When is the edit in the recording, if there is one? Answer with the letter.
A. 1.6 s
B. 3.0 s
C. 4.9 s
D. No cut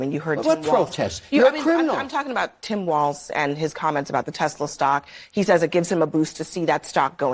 A